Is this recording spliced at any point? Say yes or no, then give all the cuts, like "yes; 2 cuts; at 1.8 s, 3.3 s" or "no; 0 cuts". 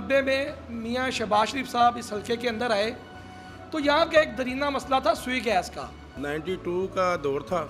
yes; 1 cut; at 6.1 s